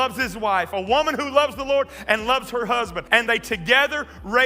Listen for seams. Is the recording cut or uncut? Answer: cut